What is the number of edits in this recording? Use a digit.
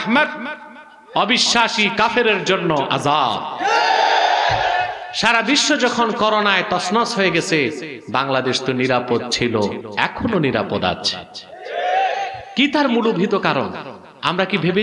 3